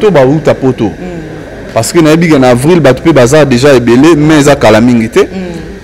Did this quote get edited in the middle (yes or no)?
no